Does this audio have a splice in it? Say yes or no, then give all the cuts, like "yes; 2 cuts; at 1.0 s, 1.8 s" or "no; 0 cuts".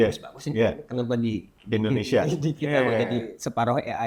no; 0 cuts